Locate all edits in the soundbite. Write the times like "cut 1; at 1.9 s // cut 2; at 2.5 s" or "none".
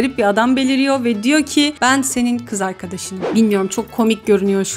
cut 1; at 3.3 s